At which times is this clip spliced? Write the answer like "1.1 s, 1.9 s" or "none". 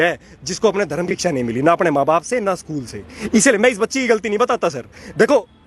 1.1 s